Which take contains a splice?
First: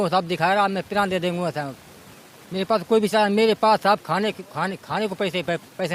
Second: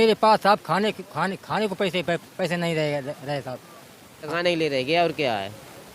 second; 1 cut; at 4.3 s

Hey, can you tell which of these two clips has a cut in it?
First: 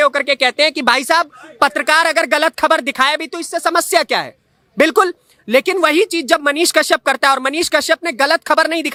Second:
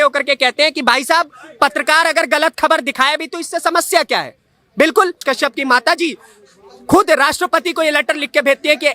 second; 1 cut; at 5.2 s

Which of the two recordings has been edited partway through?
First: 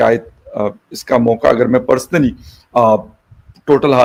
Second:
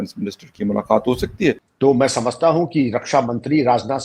second; 1 cut; at 1.7 s

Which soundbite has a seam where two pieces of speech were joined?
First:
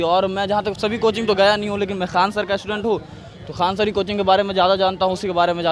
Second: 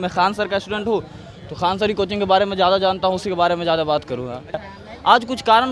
second; 1 cut; at 4.7 s

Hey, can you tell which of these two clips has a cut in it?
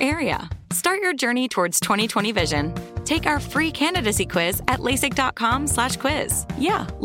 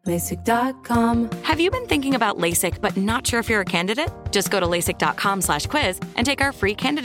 second; 1 cut; at 1.1 s

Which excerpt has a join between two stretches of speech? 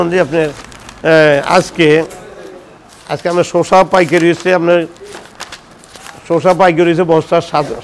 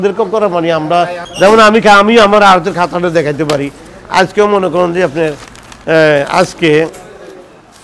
second; 1 cut; at 1.2 s

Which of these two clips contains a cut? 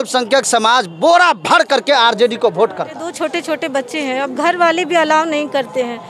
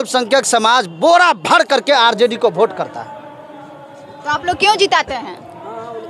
first; 1 cut; at 3.1 s

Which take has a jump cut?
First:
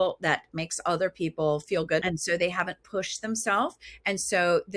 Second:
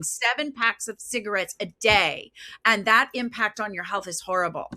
first; 1 cut; at 2.0 s

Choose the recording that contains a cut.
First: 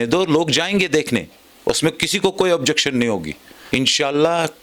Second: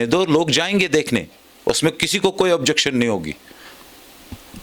first; 1 cut; at 3.5 s

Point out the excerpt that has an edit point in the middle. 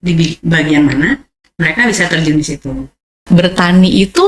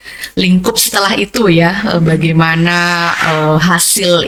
first; 1 cut; at 3.2 s

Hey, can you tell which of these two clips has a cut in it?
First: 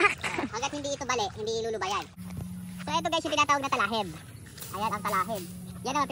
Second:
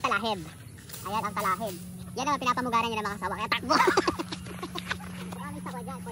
first; 1 cut; at 2.2 s

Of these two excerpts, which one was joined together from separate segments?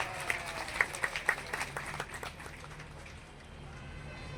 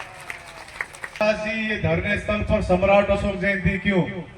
second; 1 cut; at 1.2 s

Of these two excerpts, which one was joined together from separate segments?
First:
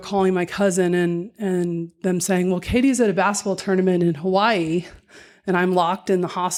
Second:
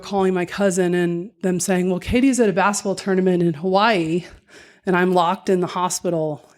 second; 1 cut; at 1.3 s

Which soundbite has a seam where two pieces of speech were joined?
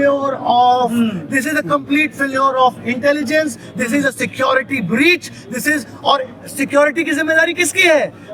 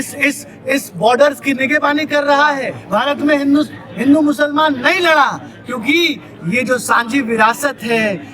second; 1 cut; at 2.7 s

